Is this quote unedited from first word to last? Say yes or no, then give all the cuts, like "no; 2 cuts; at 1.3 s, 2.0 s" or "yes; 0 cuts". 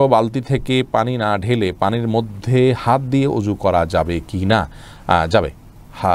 yes; 0 cuts